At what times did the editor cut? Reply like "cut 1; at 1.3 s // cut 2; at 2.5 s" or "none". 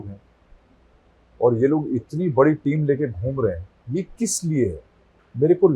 cut 1; at 3.7 s